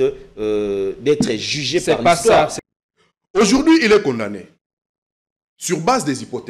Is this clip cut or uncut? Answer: cut